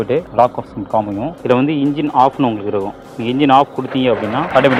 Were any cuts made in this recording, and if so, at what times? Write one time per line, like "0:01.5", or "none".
none